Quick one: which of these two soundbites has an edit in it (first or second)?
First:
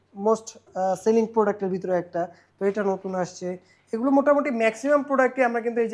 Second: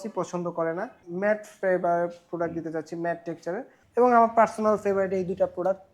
second